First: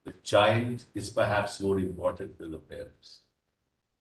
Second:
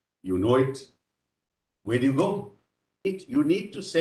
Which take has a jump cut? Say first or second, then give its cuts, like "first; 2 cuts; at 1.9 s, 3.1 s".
second; 1 cut; at 3.1 s